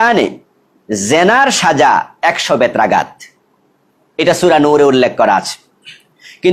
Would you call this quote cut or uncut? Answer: uncut